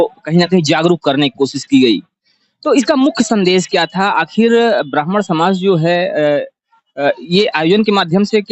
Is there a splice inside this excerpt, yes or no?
no